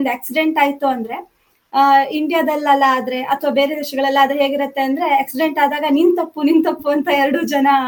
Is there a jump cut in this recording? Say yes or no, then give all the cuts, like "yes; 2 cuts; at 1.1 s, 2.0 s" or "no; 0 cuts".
no; 0 cuts